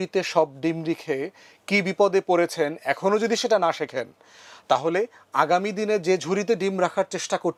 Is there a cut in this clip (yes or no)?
no